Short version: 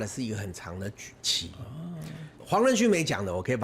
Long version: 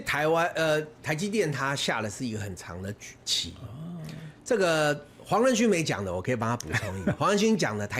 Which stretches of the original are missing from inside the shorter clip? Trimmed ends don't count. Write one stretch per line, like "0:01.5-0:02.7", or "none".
0:04.3-0:05.1